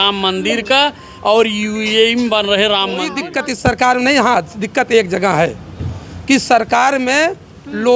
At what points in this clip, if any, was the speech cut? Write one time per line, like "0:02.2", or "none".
0:03.2